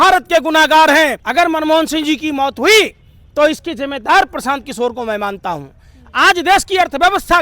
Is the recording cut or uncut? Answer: cut